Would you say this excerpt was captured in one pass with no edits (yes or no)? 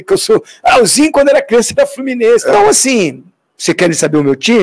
no